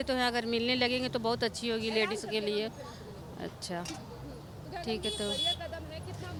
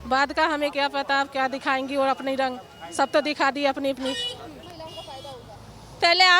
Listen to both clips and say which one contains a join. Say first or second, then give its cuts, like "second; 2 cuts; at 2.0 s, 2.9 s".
second; 1 cut; at 4.6 s